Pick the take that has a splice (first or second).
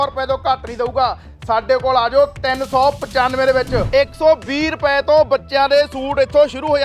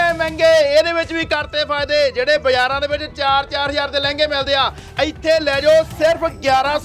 first